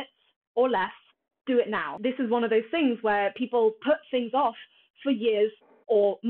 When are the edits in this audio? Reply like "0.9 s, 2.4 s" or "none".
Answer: 1.9 s